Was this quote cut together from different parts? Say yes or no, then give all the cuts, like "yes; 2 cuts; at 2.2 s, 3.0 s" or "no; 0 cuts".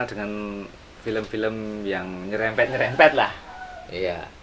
no; 0 cuts